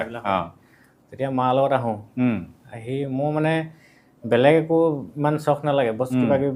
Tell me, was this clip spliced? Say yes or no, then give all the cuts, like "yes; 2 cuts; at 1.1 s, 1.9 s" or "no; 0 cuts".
no; 0 cuts